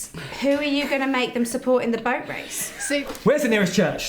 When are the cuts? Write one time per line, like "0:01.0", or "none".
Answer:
0:03.0